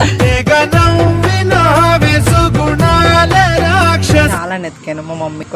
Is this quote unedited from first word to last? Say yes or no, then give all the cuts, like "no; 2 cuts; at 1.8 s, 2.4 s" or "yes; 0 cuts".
no; 1 cut; at 4.3 s